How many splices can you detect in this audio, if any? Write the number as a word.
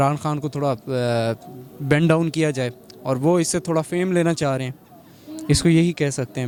zero